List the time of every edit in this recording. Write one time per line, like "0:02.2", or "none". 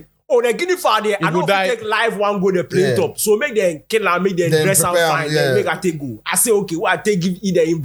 none